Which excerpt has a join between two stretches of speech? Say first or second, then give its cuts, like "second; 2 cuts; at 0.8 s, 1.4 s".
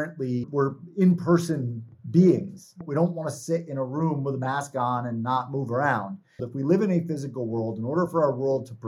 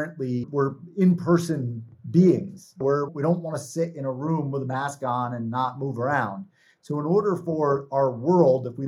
first; 2 cuts; at 2.8 s, 6.5 s